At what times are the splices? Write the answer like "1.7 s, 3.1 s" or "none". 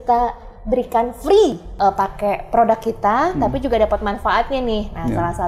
1.6 s